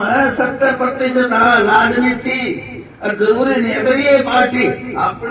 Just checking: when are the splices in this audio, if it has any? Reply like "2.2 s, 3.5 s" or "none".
none